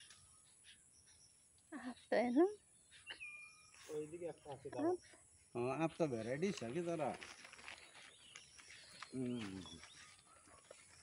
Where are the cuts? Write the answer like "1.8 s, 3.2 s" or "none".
none